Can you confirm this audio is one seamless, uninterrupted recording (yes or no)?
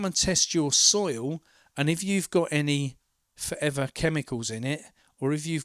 yes